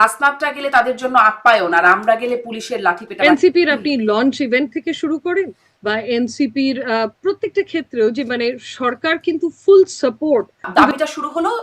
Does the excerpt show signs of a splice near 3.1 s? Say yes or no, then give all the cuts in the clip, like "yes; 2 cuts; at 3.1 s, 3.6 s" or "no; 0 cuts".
yes; 2 cuts; at 3.1 s, 10.7 s